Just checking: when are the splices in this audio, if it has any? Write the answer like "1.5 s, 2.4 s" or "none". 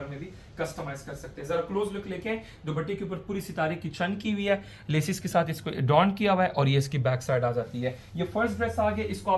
none